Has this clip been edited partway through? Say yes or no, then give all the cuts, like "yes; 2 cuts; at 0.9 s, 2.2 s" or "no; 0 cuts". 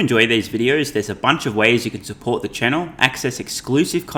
no; 0 cuts